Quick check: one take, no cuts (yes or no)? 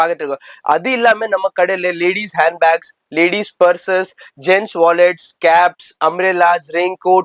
yes